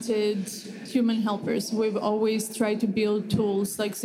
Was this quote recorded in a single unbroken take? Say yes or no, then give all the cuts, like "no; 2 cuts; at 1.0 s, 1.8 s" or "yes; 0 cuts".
yes; 0 cuts